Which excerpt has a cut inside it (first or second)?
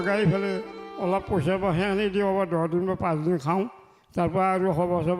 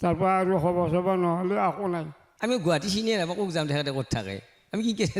second